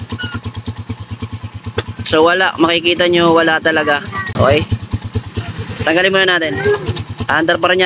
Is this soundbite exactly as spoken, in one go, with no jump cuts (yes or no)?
yes